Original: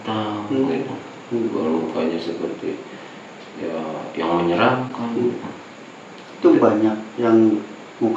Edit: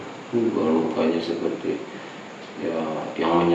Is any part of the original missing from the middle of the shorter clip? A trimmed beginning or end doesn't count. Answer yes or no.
no